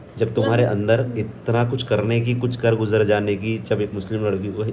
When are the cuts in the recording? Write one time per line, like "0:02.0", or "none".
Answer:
none